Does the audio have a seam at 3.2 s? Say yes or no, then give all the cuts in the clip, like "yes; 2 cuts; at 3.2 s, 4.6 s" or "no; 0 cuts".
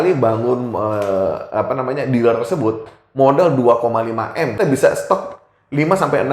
no; 1 cut; at 4.5 s